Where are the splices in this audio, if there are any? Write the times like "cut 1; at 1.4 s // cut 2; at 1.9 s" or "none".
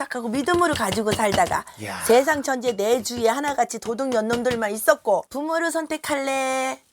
cut 1; at 5.3 s

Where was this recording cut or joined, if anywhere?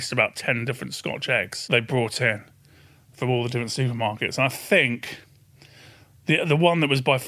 cut 1; at 1.6 s

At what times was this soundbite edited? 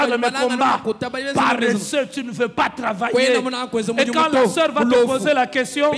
none

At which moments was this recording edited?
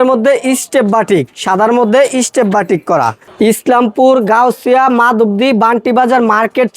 cut 1; at 3.2 s

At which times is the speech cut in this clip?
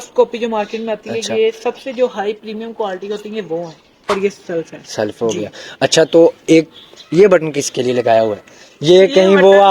cut 1; at 4.0 s

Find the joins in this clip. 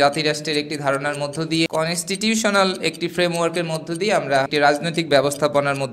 cut 1; at 1.7 s // cut 2; at 4.5 s

